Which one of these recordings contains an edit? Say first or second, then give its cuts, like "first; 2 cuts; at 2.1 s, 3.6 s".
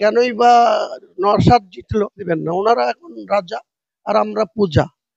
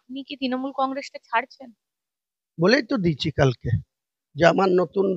first; 1 cut; at 2.2 s